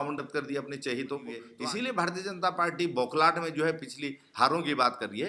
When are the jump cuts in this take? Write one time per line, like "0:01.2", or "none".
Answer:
0:01.5